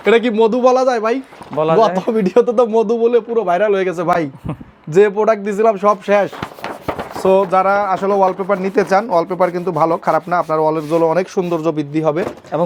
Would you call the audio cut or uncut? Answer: uncut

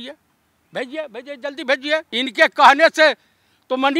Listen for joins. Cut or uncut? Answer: cut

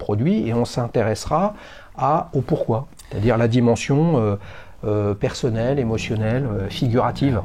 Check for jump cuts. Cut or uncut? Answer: uncut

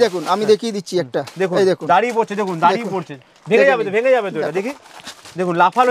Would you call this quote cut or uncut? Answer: uncut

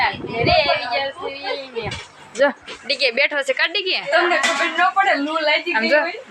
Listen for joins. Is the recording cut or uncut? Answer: uncut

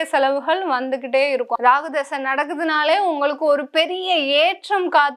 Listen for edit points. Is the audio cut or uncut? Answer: cut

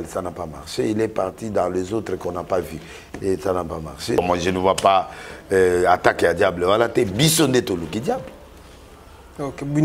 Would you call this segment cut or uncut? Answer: cut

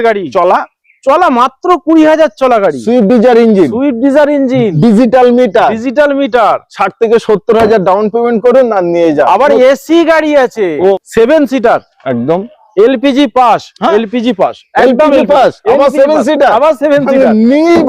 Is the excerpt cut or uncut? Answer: cut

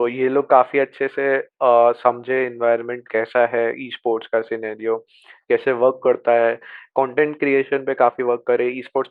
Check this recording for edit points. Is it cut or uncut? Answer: uncut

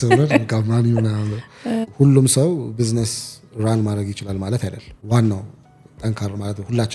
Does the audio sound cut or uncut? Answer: cut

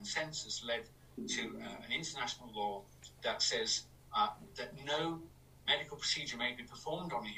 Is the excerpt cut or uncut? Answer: uncut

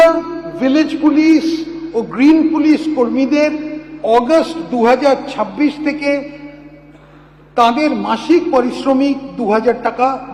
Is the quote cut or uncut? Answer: uncut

